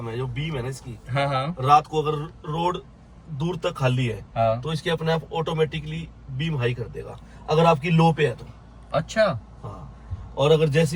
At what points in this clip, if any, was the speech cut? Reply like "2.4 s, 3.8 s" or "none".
none